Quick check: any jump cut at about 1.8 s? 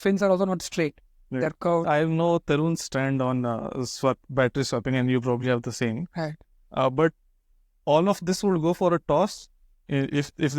yes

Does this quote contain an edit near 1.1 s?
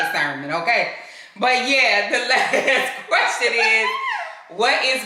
no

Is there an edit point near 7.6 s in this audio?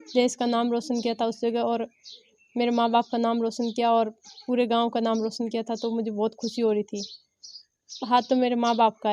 yes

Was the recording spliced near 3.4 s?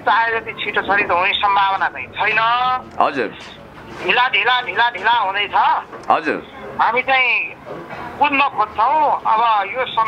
no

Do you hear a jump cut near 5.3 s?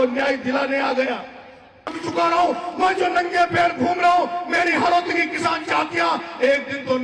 no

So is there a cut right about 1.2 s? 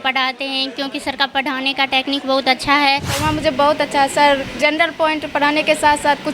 no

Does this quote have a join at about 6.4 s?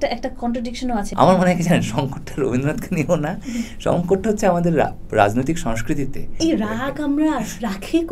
yes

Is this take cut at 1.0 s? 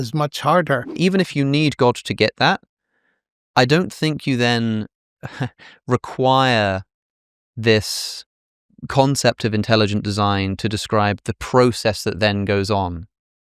yes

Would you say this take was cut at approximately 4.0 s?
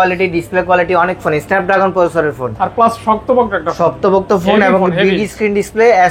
no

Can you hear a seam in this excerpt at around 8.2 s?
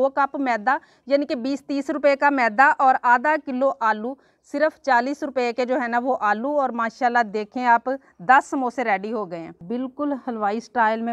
no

